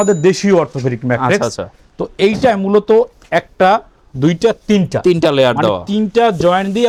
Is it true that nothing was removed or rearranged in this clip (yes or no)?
yes